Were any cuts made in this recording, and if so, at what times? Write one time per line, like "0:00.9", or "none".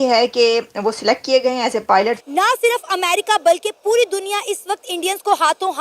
0:02.2